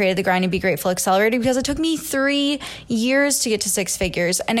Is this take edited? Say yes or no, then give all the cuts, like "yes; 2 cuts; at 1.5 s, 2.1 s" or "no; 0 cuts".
no; 0 cuts